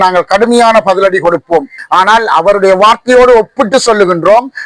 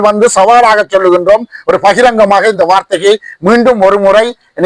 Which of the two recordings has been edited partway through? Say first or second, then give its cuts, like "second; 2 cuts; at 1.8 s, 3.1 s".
first; 1 cut; at 1.8 s